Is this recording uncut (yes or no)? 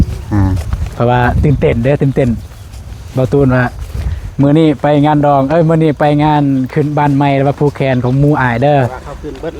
yes